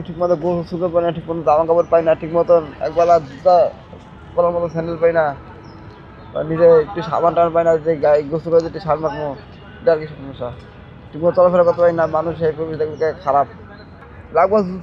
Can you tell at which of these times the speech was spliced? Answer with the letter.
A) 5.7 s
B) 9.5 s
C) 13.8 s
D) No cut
C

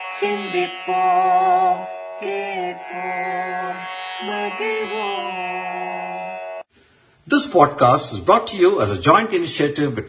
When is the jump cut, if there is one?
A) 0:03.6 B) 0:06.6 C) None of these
A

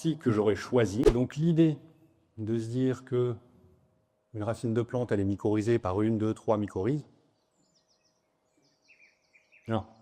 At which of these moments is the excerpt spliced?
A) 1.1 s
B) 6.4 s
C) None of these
A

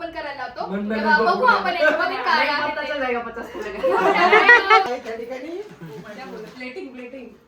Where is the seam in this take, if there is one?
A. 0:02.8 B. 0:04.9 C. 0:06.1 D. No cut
B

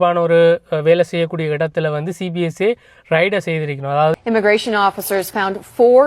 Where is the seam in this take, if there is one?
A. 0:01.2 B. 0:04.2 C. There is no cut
B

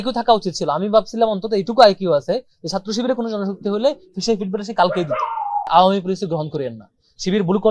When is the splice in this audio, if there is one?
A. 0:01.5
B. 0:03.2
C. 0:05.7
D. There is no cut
C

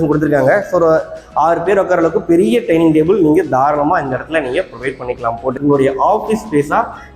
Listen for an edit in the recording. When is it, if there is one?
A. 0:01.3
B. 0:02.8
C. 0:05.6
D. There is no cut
C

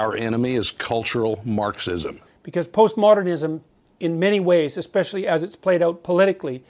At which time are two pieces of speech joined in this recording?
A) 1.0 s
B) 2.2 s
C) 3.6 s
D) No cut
B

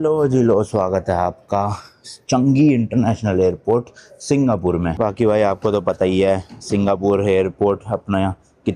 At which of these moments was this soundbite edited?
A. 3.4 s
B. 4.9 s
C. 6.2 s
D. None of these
D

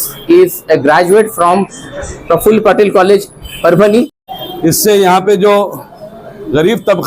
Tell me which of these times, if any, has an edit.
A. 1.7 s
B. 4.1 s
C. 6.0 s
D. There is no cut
B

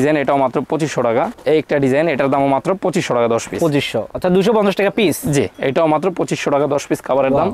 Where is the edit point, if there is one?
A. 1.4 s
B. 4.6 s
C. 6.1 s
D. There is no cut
D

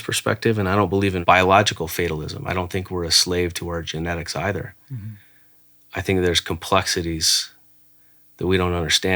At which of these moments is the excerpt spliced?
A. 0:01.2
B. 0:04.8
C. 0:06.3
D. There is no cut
A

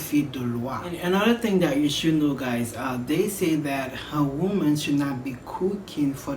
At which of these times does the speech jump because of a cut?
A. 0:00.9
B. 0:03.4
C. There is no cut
A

